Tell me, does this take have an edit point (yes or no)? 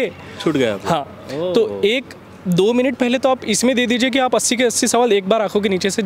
no